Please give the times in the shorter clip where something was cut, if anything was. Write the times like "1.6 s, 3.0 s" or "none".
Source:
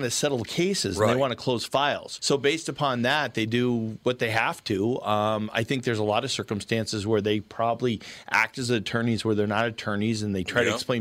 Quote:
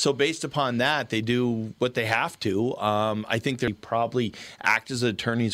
3.7 s